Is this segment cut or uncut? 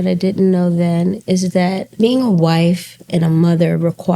cut